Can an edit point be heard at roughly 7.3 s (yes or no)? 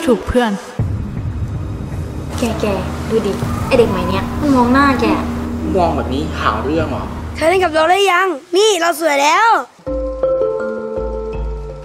yes